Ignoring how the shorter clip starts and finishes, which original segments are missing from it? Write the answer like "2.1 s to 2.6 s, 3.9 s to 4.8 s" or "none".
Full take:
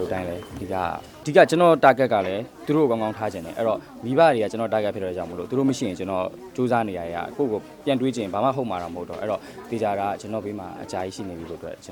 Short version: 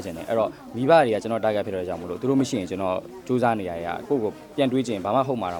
none